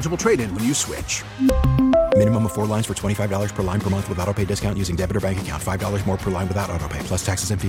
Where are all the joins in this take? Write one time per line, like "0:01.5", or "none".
none